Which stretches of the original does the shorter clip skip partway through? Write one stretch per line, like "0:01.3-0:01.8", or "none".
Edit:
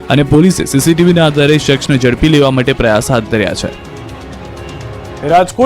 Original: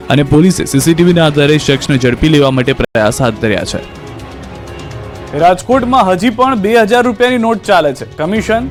0:02.8-0:02.9